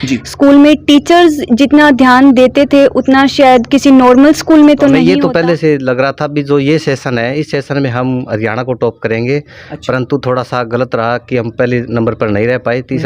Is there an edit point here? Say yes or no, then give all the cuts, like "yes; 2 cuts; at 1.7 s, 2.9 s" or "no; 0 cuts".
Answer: yes; 1 cut; at 5.0 s